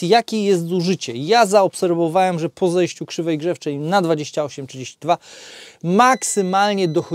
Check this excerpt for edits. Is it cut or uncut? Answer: uncut